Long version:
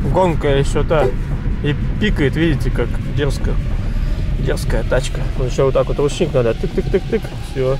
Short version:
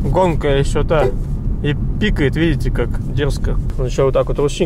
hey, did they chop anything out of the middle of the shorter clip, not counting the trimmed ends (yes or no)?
yes